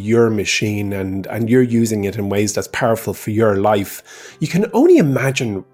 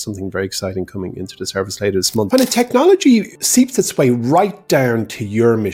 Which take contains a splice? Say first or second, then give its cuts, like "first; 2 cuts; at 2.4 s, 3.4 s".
second; 2 cuts; at 2.3 s, 3.4 s